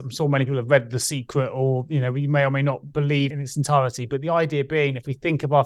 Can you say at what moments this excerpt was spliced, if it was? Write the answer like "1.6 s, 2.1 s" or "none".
3.3 s